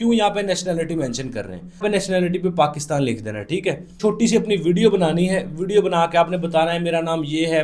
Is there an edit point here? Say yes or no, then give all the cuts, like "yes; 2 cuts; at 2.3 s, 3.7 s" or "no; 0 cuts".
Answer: yes; 2 cuts; at 1.8 s, 3.9 s